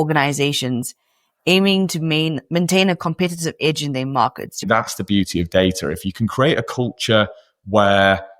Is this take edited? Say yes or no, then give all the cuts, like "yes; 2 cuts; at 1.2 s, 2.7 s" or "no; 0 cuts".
yes; 1 cut; at 4.6 s